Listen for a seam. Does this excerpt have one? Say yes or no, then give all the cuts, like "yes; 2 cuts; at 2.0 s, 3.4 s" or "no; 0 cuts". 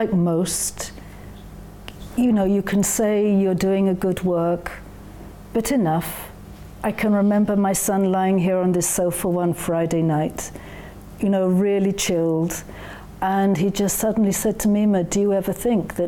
no; 0 cuts